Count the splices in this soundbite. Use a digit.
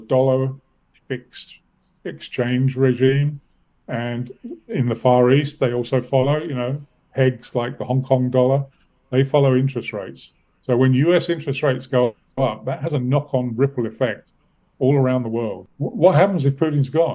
1